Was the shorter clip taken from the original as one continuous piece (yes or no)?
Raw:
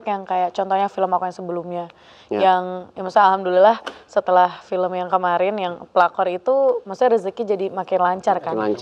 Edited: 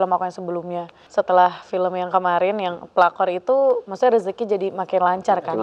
no